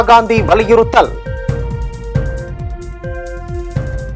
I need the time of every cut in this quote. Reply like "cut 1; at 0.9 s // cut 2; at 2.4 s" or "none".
cut 1; at 1.1 s